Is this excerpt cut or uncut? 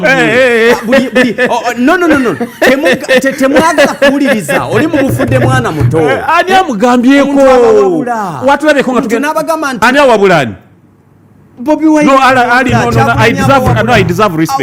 uncut